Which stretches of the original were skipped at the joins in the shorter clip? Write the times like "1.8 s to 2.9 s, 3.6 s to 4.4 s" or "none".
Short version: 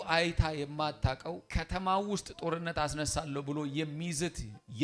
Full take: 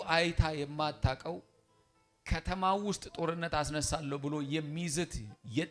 1.5 s to 2.2 s